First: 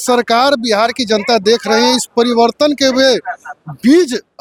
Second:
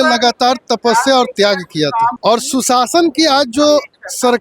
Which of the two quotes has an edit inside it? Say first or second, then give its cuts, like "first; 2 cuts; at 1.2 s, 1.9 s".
second; 1 cut; at 2.2 s